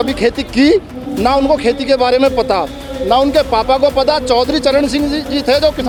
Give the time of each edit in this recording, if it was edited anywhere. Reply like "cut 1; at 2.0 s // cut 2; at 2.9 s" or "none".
none